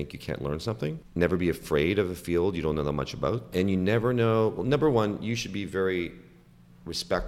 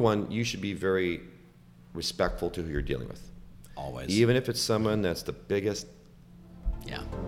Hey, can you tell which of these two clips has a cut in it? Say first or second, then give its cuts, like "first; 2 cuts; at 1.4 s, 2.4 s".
first; 2 cuts; at 1.0 s, 3.5 s